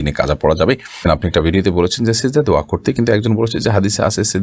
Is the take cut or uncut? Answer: cut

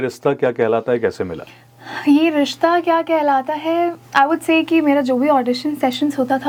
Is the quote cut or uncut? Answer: uncut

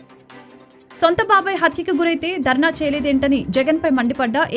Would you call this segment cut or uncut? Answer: uncut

